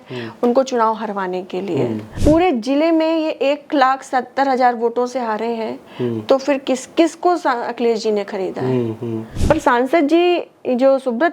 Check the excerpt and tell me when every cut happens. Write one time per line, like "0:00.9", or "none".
0:02.1
0:09.3